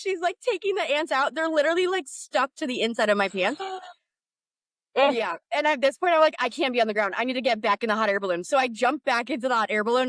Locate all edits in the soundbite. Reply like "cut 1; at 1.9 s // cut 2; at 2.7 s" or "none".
none